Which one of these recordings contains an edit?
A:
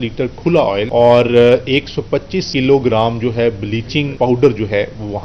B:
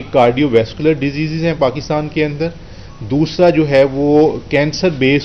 A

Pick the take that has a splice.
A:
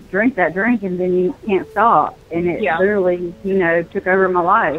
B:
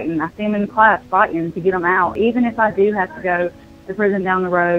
B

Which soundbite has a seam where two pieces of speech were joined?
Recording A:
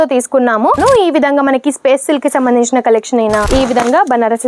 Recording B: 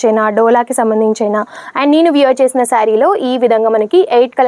A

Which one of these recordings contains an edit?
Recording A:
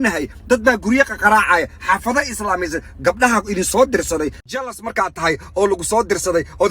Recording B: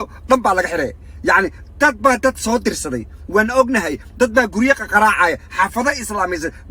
A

